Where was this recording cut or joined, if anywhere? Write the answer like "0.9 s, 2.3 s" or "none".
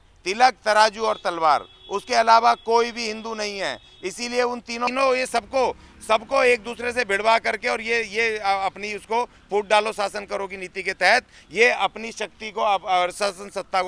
4.8 s